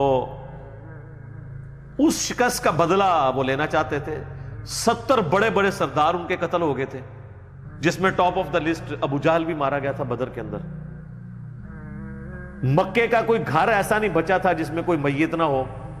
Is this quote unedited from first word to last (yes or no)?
yes